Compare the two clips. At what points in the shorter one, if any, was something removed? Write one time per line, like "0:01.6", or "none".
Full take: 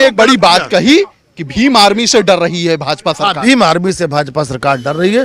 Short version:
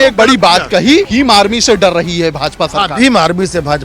0:01.1